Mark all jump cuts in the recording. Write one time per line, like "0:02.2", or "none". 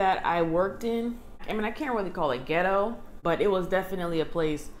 0:01.3
0:03.1